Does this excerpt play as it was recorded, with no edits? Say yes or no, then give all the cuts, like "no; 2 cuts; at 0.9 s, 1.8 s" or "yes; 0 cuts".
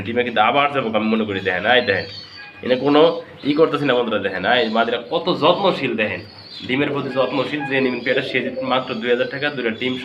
yes; 0 cuts